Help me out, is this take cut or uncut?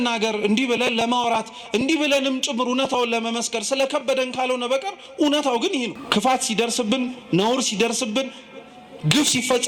cut